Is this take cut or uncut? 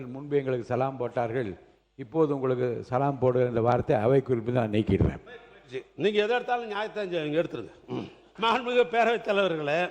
cut